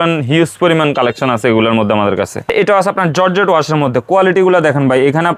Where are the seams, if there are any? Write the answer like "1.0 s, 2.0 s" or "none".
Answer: 2.5 s